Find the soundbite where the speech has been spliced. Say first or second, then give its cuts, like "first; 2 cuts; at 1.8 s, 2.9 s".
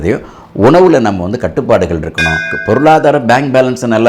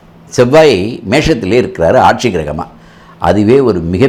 first; 1 cut; at 2.5 s